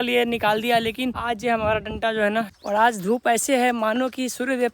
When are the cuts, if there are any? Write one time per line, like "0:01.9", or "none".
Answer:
0:01.2
0:02.6